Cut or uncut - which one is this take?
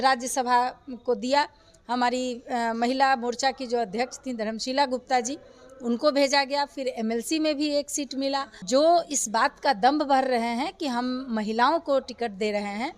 cut